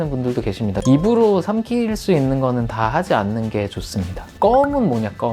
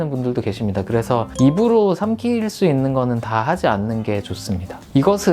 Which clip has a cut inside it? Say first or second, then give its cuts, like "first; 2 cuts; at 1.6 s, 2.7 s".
first; 2 cuts; at 0.8 s, 4.3 s